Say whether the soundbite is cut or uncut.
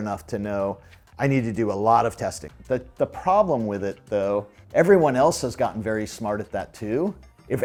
uncut